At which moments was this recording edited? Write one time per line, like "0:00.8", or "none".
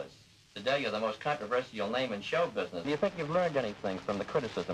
0:02.9

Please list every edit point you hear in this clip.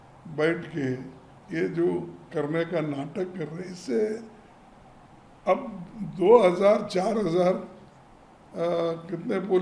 none

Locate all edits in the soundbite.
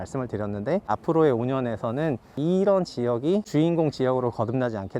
0:00.9
0:02.4
0:03.5

